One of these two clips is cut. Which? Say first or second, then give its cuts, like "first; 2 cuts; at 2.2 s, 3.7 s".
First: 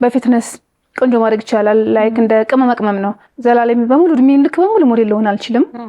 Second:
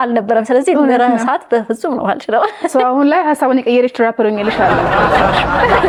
first; 1 cut; at 3.3 s